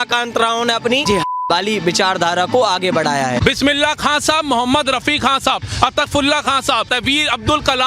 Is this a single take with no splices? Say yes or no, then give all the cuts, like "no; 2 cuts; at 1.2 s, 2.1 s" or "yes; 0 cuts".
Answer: no; 2 cuts; at 3.4 s, 6.9 s